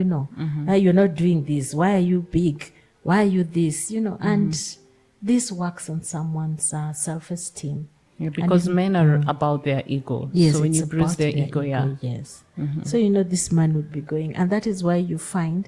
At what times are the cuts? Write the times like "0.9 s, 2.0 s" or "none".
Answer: none